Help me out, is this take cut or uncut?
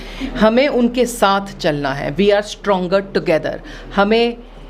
uncut